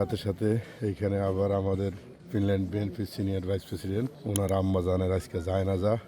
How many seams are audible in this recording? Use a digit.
1